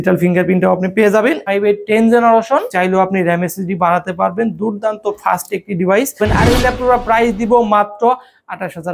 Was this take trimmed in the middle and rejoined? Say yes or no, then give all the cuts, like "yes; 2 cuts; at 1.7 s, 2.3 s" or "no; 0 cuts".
yes; 3 cuts; at 1.4 s, 2.7 s, 6.2 s